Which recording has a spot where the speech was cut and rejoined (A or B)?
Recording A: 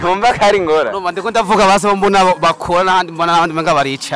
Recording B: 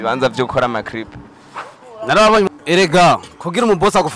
B